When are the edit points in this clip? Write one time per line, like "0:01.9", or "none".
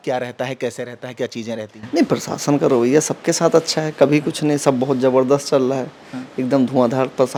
none